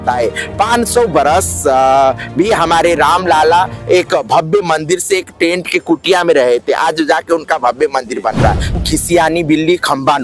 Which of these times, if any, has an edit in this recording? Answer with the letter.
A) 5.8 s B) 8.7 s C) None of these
B